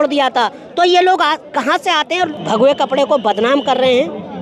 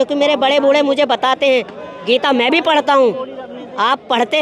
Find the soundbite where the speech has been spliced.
first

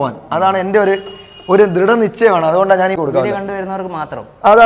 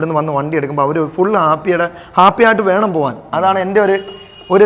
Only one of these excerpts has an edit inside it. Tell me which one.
first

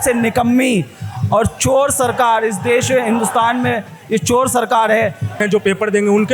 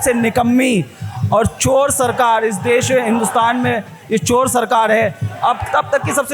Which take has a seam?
first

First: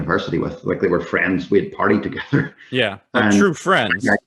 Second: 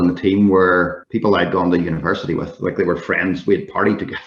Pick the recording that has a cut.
second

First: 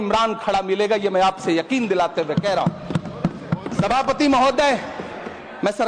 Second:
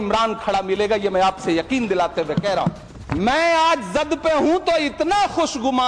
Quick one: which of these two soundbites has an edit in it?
second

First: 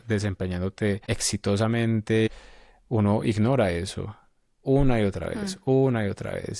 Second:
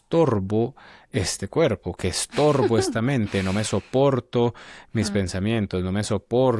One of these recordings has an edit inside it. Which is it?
first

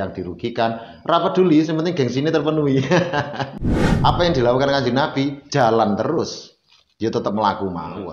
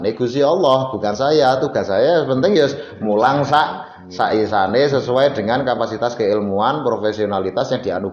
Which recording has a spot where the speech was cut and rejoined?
first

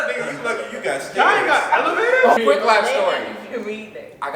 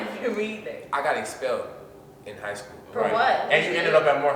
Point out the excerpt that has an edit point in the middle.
first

